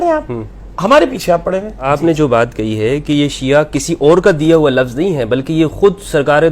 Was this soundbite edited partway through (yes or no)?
yes